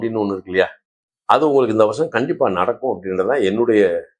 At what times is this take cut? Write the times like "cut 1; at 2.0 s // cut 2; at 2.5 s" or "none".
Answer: none